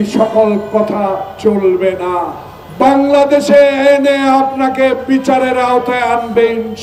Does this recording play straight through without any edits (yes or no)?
yes